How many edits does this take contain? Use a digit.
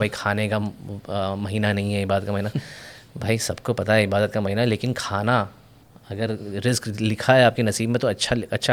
0